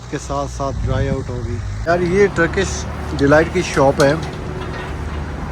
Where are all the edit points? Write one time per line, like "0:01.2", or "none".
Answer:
0:01.9